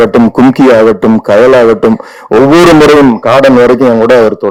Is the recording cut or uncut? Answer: uncut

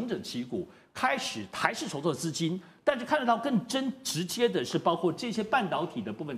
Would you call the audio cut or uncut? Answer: uncut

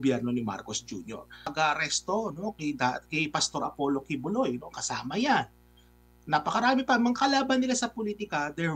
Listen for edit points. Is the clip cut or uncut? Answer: cut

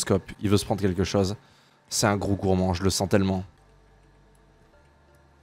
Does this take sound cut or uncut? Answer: cut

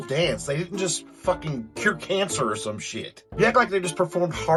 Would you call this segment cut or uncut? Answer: uncut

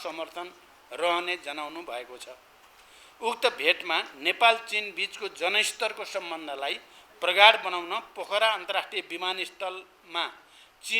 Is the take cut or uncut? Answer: uncut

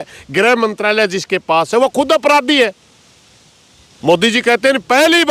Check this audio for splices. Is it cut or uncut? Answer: uncut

